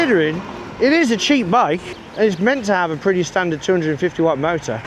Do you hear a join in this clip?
no; 0 cuts

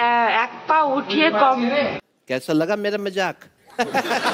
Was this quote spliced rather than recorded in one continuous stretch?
no; 0 cuts

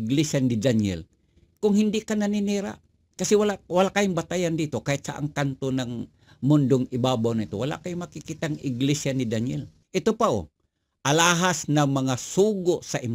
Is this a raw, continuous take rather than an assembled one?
no; 1 cut; at 9.7 s

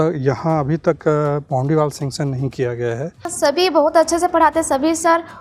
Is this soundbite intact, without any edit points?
no; 1 cut; at 3.3 s

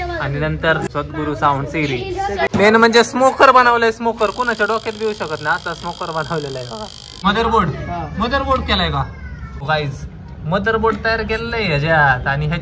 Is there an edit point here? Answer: yes; 4 cuts; at 0.8 s, 2.5 s, 7.2 s, 9.6 s

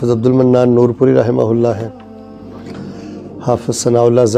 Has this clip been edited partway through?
no; 0 cuts

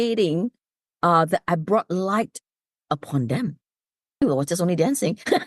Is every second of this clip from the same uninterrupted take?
no; 1 cut; at 4.2 s

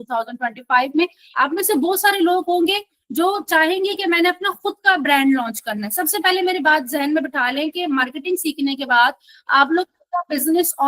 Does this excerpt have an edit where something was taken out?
yes; 1 cut; at 1.2 s

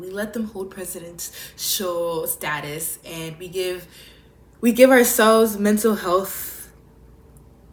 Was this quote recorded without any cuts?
yes; 0 cuts

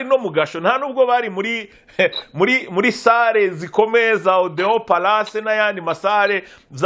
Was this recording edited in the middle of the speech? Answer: no; 0 cuts

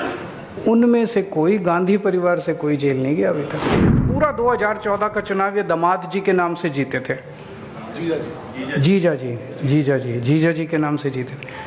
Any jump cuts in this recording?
yes; 1 cut; at 4.0 s

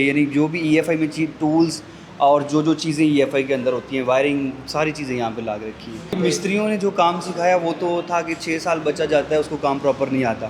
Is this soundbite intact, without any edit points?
no; 1 cut; at 6.1 s

